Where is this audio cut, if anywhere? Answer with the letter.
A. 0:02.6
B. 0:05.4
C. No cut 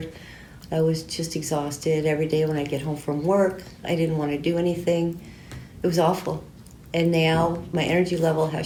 C